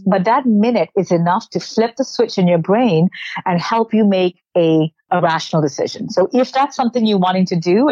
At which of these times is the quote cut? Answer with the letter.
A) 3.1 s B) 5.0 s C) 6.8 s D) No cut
B